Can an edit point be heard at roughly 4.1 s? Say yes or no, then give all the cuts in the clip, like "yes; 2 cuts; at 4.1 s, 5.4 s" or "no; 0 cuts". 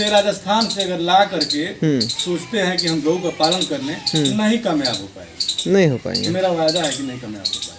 no; 0 cuts